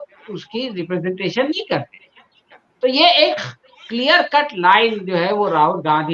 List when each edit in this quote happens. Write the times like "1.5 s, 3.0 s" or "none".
none